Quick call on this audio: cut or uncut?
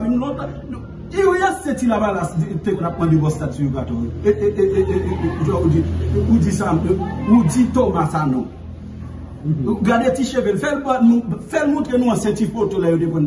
uncut